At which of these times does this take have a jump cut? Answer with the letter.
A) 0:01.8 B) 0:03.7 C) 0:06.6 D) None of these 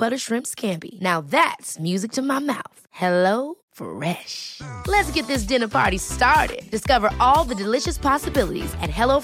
D